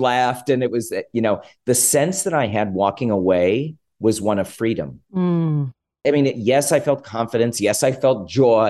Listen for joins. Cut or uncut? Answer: cut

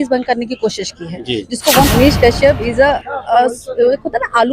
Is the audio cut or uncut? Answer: cut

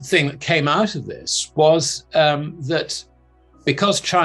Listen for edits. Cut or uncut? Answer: uncut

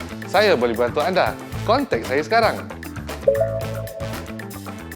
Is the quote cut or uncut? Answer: cut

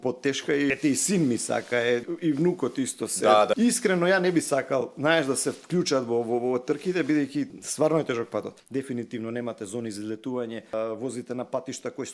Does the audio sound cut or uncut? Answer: cut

